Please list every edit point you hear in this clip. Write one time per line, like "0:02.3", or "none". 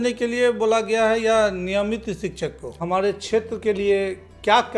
0:02.8